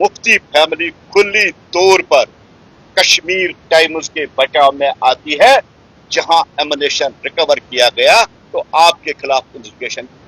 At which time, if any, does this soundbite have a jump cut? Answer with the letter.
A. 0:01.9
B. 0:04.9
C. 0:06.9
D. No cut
D